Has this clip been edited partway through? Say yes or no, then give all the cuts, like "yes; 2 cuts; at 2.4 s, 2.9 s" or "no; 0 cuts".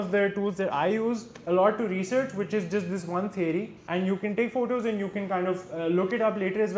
yes; 1 cut; at 3.8 s